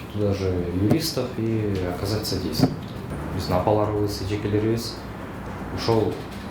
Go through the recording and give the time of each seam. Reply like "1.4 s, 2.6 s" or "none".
3.1 s